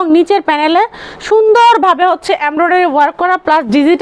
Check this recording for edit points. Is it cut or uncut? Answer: uncut